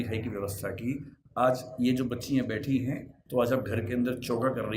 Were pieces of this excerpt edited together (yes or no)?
yes